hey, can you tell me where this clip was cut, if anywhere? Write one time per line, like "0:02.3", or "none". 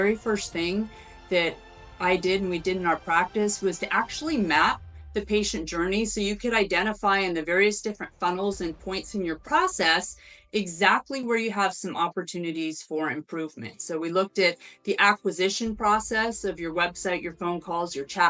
none